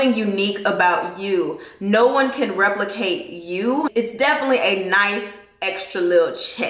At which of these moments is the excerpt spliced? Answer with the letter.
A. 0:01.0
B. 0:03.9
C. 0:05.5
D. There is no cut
B